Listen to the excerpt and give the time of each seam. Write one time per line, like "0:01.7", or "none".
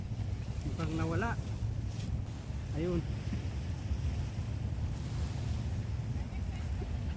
0:02.3